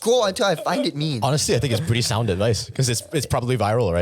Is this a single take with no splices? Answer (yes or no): yes